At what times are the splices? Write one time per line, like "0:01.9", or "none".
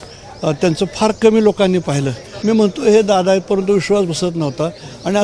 0:02.3